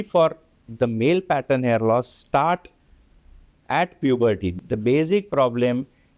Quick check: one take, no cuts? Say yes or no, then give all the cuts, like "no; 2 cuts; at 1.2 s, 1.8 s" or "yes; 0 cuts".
no; 1 cut; at 4.6 s